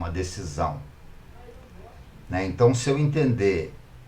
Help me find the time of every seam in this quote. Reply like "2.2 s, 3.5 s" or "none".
none